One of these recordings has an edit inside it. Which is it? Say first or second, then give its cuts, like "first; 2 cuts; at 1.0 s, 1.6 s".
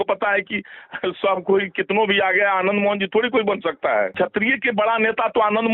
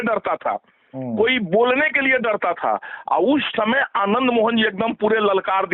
first; 1 cut; at 4.1 s